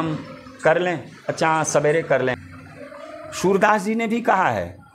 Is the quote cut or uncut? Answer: cut